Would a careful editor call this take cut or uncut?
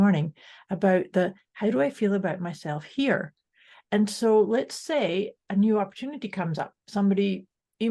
uncut